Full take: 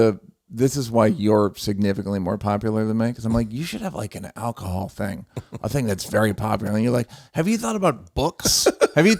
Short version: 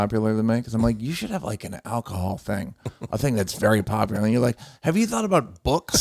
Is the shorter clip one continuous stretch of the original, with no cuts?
yes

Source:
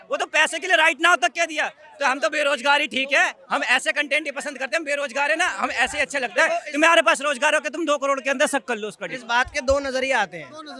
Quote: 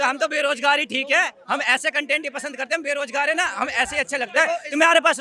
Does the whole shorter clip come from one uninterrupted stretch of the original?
yes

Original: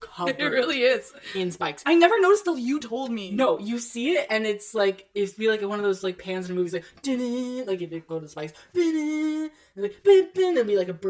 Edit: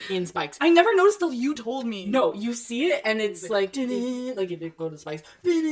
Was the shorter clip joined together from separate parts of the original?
yes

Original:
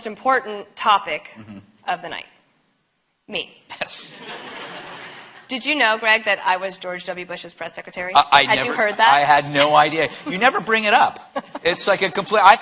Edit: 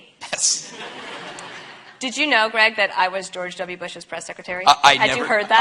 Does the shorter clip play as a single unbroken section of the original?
yes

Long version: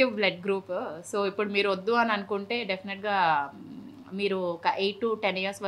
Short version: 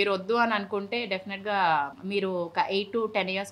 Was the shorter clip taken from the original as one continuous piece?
no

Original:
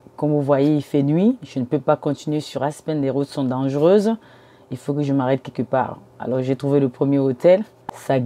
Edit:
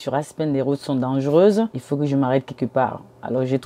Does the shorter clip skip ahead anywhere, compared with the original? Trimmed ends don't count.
yes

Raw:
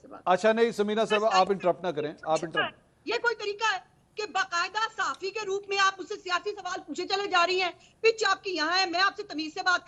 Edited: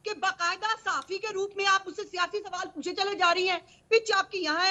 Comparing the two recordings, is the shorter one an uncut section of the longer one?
yes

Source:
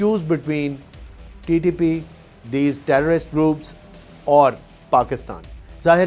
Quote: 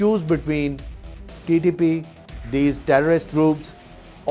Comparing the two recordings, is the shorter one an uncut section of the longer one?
yes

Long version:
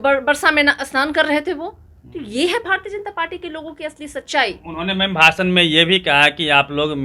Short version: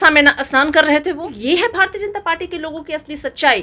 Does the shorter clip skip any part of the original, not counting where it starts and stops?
yes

